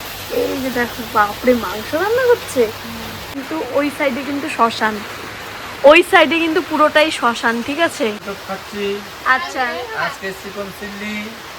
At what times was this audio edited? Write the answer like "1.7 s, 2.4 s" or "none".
3.4 s, 8.2 s